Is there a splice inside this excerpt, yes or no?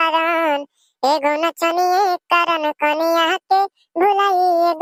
no